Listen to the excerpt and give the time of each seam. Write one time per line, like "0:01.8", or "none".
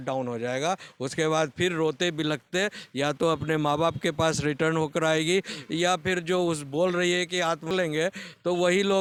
none